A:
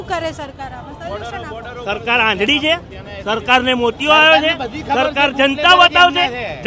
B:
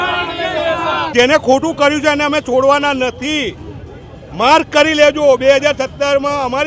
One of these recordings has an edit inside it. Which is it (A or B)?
B